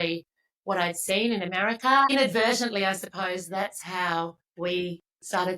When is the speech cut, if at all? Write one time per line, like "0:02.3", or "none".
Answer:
0:02.1
0:04.4